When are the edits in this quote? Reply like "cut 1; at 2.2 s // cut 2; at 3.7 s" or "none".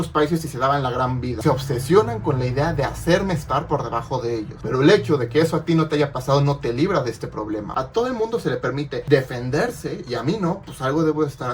cut 1; at 1.3 s // cut 2; at 7.7 s